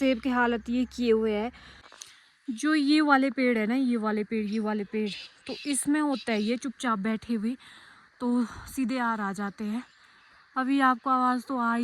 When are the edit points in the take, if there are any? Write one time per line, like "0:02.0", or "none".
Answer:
0:01.9